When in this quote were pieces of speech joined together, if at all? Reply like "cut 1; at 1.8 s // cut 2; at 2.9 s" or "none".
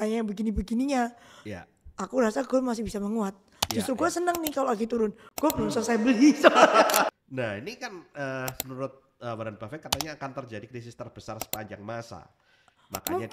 cut 1; at 7.1 s